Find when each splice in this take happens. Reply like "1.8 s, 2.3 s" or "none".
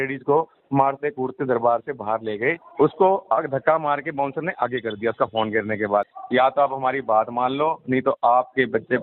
2.6 s, 6.2 s